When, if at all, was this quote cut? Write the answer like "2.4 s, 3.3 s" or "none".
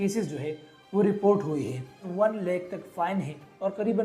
2.1 s